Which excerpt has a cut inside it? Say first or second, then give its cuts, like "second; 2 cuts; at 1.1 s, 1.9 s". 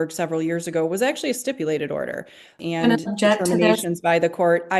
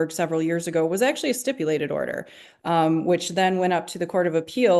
first; 1 cut; at 2.6 s